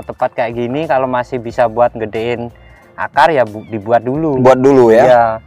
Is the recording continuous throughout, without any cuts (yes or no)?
yes